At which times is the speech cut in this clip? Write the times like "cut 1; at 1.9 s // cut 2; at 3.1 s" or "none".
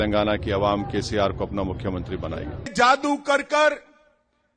cut 1; at 2.7 s